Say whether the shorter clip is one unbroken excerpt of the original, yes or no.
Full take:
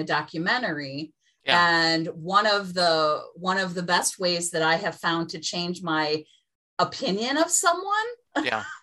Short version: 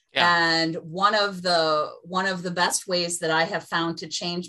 yes